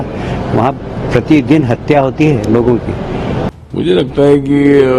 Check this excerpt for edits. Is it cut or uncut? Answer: cut